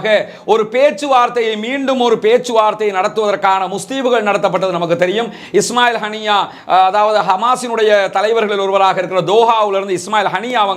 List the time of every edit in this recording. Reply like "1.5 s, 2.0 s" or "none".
none